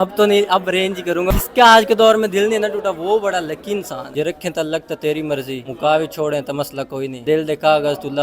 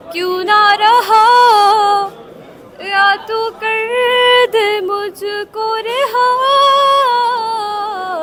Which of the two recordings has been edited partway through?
first; 4 cuts; at 1.3 s, 4.1 s, 5.6 s, 7.2 s

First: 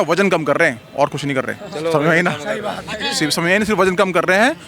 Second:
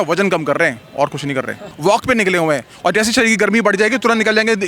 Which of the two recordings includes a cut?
second; 1 cut; at 1.7 s

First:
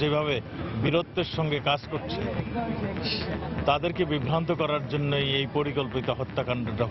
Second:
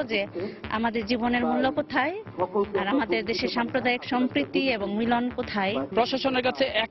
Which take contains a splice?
second; 1 cut; at 5.9 s

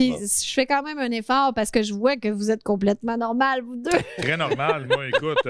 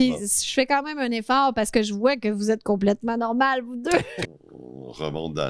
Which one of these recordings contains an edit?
second; 1 cut; at 4.2 s

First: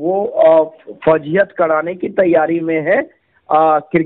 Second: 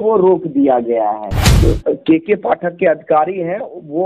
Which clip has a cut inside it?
second; 1 cut; at 1.5 s

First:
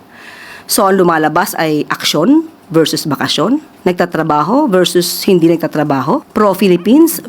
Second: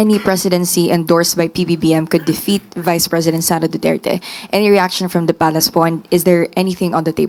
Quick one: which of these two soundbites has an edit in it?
first; 2 cuts; at 3.7 s, 6.3 s

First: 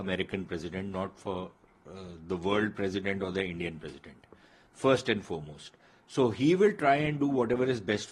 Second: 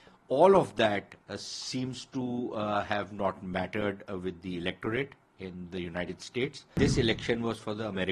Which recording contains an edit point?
second; 1 cut; at 6.7 s

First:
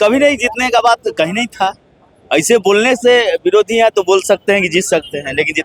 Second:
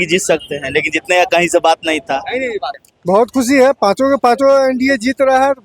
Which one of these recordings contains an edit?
second; 1 cut; at 2.7 s

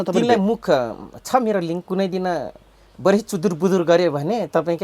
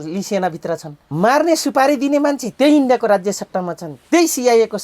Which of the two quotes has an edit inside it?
second; 1 cut; at 1.0 s

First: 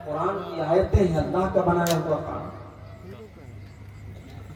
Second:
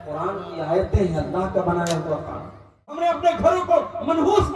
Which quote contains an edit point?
second; 1 cut; at 3.0 s

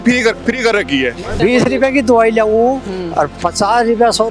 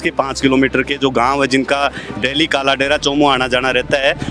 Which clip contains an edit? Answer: first; 1 cut; at 1.4 s

